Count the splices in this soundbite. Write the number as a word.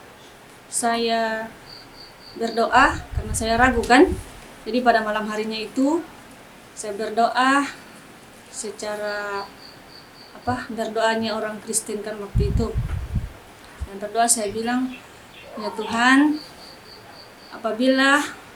zero